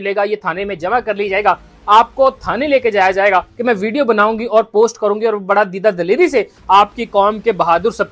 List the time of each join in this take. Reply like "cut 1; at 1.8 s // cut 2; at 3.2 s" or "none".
cut 1; at 3.5 s